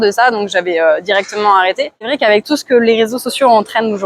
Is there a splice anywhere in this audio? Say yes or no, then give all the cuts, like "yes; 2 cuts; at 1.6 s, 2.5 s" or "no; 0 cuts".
no; 0 cuts